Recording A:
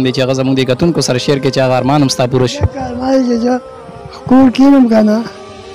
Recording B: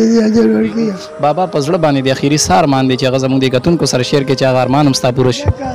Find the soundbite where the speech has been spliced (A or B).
B